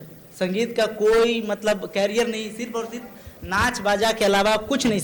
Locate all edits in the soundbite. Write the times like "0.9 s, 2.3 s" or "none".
none